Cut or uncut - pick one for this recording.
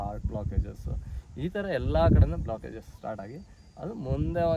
uncut